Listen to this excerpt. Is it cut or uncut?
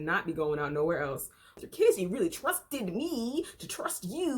cut